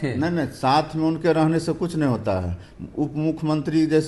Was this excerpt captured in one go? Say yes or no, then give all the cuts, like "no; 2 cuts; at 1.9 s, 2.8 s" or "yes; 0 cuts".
yes; 0 cuts